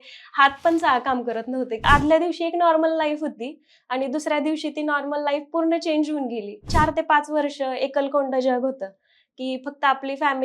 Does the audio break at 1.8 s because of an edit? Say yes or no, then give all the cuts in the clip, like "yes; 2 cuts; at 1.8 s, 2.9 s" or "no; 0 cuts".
yes; 2 cuts; at 1.8 s, 6.7 s